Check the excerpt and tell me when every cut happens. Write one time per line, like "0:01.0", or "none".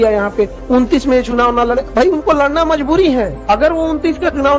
0:03.4